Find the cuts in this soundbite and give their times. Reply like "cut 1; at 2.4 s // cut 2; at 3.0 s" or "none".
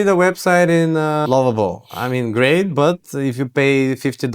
cut 1; at 1.2 s